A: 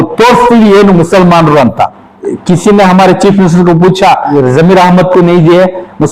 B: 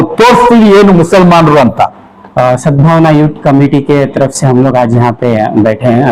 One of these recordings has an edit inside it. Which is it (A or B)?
A